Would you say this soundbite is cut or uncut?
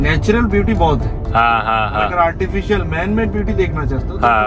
uncut